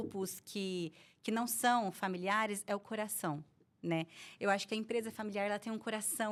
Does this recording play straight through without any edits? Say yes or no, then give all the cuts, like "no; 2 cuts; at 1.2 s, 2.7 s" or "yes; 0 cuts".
yes; 0 cuts